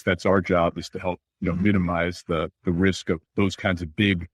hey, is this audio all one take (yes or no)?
no